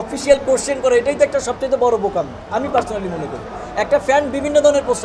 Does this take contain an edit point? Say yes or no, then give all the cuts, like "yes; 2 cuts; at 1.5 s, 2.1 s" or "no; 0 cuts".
no; 0 cuts